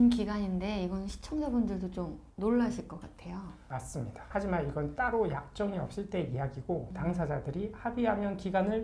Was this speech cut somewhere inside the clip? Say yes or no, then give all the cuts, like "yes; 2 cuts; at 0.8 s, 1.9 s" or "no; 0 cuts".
no; 0 cuts